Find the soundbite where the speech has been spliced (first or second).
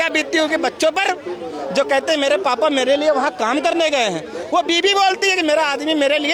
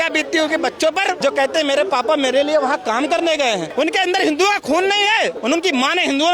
second